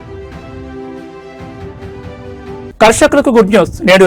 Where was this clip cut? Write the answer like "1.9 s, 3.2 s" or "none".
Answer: 2.7 s